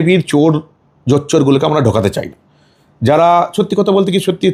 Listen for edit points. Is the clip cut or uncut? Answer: uncut